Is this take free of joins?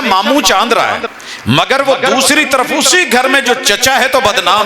no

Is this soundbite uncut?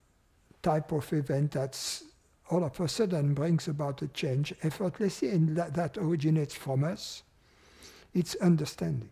yes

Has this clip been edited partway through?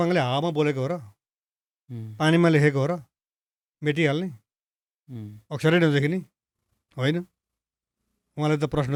no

